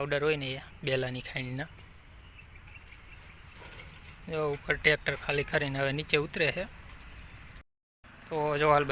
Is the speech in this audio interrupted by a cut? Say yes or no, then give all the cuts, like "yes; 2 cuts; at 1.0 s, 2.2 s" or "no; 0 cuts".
yes; 1 cut; at 7.6 s